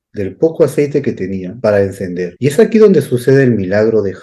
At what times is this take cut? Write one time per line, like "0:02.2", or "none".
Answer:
0:01.5
0:02.3